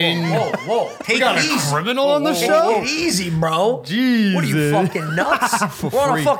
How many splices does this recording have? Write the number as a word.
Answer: zero